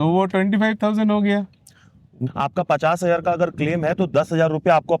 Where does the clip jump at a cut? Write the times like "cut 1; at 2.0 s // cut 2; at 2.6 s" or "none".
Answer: cut 1; at 2.2 s